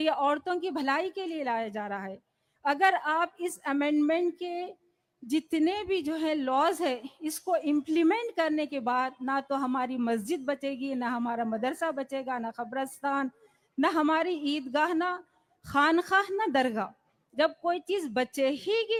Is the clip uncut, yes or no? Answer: yes